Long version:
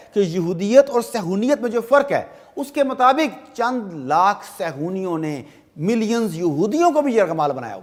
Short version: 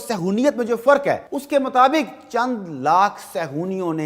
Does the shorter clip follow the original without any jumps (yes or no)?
no